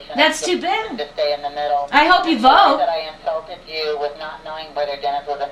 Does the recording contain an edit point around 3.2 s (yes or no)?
no